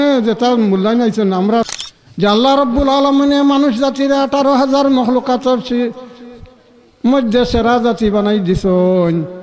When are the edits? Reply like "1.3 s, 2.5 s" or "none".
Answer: 1.7 s

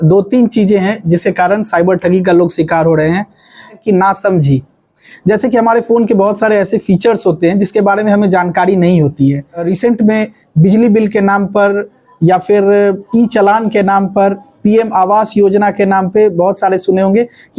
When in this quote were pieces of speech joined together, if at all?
3.8 s, 9.7 s

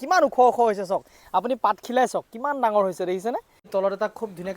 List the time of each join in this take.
3.6 s

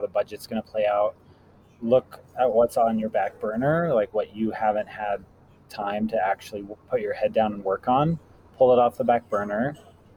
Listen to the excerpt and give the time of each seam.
none

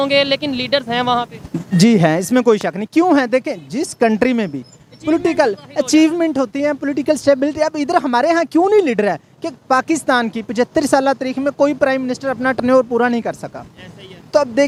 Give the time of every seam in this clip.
none

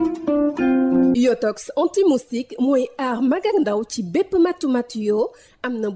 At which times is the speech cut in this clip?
0.9 s

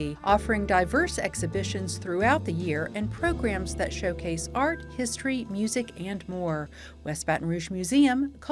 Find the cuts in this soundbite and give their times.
none

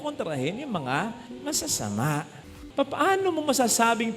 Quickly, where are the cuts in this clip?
2.6 s

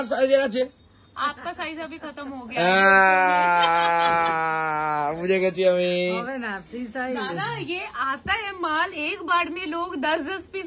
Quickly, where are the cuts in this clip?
none

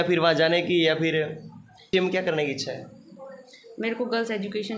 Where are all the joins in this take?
1.9 s

